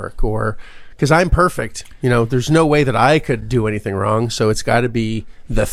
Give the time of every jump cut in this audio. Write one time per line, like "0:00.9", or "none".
none